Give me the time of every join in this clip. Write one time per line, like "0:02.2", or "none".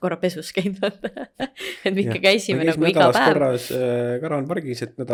none